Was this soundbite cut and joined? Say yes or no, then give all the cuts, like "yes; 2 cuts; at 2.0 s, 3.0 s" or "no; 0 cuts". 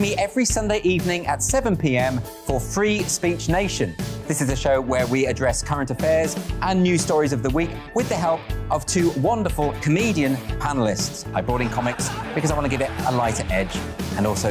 no; 0 cuts